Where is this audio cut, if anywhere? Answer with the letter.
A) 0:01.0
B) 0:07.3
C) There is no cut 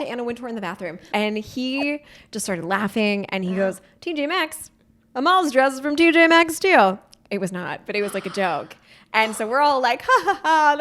A